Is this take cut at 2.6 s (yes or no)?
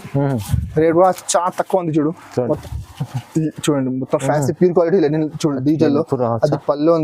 yes